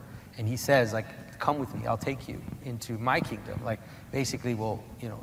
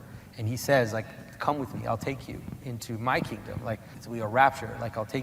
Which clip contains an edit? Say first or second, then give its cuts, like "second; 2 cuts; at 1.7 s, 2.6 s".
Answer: second; 1 cut; at 4.0 s